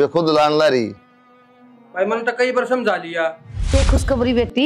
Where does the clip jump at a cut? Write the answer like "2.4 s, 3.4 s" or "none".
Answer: 3.8 s